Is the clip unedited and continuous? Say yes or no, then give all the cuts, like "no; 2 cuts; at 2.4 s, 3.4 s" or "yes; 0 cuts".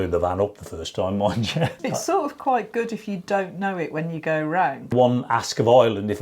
no; 2 cuts; at 1.8 s, 4.9 s